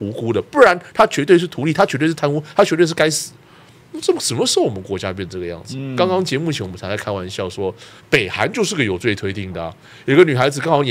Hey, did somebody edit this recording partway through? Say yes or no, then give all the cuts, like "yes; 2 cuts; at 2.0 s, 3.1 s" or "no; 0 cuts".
no; 0 cuts